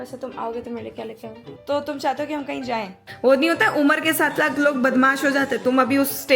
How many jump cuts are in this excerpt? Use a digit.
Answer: 2